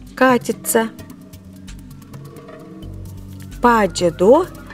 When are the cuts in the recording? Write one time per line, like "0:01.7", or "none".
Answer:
none